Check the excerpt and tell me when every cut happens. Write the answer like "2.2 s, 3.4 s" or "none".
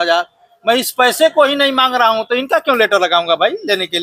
none